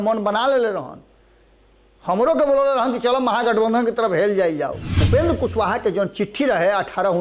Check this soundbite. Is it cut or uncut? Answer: cut